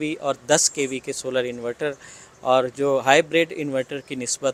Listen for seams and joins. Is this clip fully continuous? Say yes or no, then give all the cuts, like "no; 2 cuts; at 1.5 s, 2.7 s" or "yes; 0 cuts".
yes; 0 cuts